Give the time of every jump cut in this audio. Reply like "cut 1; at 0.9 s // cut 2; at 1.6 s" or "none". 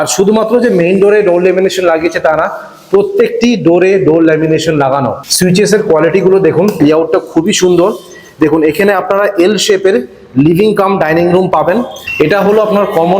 cut 1; at 5.2 s // cut 2; at 6.8 s // cut 3; at 12.0 s